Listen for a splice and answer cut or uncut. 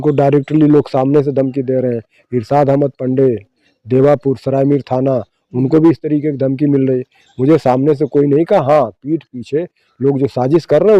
uncut